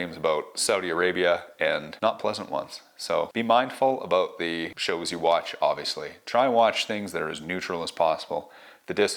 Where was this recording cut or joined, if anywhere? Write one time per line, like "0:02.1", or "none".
none